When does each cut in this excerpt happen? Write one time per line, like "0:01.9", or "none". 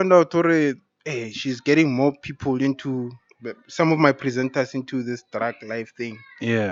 none